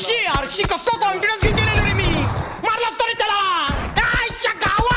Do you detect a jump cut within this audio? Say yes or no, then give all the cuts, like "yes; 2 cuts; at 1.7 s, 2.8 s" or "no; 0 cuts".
no; 0 cuts